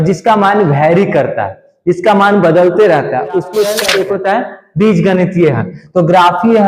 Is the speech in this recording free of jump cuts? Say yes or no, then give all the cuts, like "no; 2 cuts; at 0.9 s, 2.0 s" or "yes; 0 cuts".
no; 1 cut; at 3.6 s